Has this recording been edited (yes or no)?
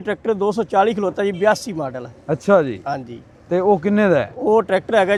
no